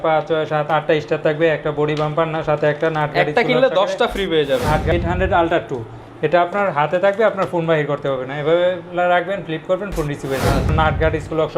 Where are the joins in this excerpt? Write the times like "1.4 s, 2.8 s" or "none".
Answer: 4.9 s, 10.7 s